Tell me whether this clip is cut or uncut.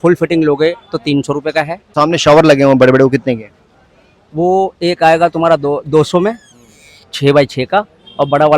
cut